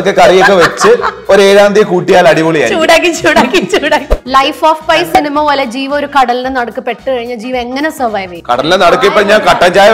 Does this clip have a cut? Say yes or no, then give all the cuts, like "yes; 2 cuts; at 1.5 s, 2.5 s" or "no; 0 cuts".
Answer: yes; 1 cut; at 4.1 s